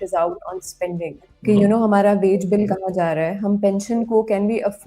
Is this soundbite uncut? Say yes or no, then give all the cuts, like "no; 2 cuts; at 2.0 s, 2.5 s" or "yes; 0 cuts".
no; 1 cut; at 1.3 s